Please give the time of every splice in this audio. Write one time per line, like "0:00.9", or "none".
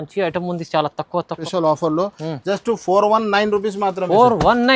0:01.4